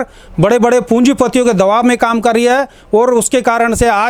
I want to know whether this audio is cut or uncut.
uncut